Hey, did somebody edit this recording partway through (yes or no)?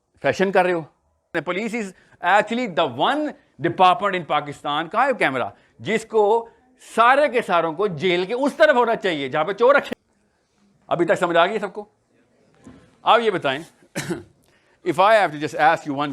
yes